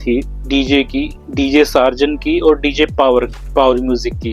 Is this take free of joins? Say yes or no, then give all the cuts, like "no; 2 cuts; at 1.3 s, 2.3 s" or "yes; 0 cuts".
yes; 0 cuts